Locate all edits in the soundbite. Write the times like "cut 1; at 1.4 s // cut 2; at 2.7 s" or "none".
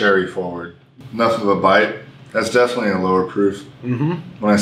cut 1; at 1.0 s